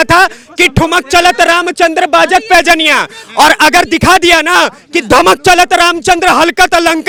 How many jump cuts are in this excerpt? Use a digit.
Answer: 0